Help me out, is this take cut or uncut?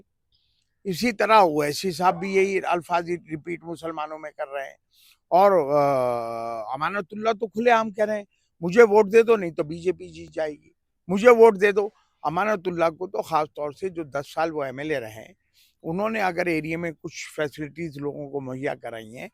uncut